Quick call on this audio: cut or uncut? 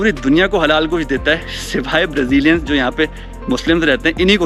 uncut